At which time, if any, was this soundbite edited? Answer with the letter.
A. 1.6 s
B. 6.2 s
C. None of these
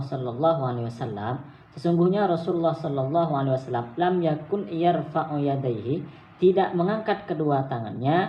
C